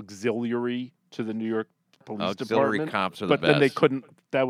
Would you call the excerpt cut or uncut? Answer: cut